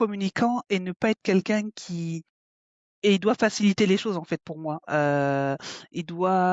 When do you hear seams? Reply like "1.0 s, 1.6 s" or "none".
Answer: none